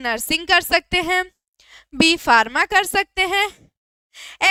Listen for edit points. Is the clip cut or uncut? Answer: uncut